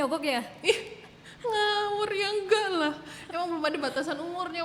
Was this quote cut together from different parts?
no; 0 cuts

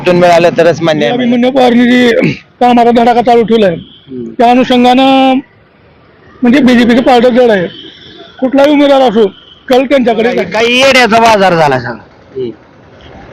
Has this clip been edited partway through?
yes; 2 cuts; at 1.1 s, 10.5 s

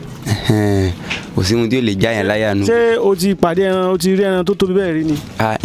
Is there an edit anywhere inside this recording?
no; 0 cuts

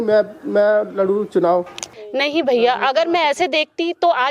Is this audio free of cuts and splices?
no; 1 cut; at 1.8 s

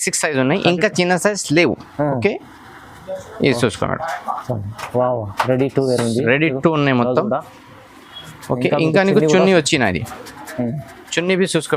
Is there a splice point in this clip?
no; 0 cuts

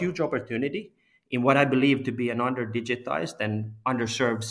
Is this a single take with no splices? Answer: yes; 0 cuts

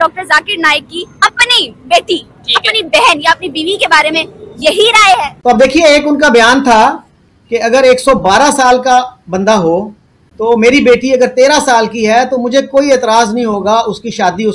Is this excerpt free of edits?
no; 1 cut; at 5.3 s

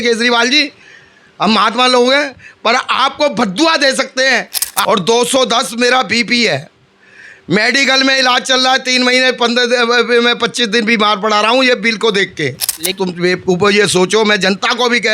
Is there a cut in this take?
yes; 2 cuts; at 4.8 s, 12.9 s

